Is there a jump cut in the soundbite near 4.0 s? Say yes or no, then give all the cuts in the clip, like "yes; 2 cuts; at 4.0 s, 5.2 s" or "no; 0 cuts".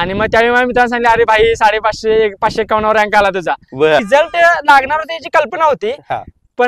yes; 1 cut; at 4.0 s